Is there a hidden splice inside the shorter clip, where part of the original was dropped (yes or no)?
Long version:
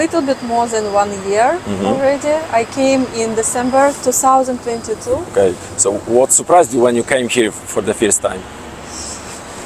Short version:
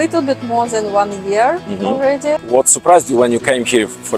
yes